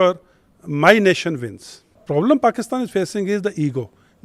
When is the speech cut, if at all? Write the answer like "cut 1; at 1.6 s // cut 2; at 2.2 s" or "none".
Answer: cut 1; at 2.0 s